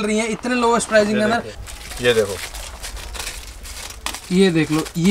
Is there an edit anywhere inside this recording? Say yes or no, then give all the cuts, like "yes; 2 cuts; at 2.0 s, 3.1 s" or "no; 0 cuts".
yes; 1 cut; at 1.6 s